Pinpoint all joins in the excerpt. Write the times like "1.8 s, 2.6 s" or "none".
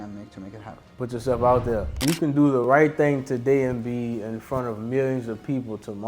0.9 s, 2.0 s